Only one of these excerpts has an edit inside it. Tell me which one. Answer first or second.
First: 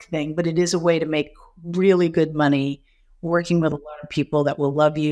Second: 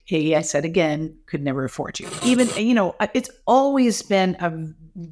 second